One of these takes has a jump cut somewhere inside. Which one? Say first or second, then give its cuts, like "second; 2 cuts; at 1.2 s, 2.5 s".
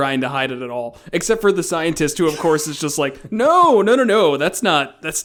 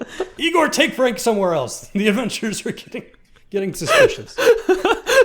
second; 1 cut; at 3.9 s